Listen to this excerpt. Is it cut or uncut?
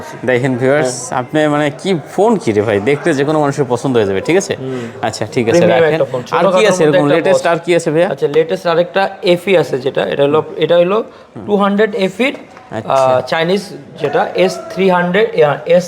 uncut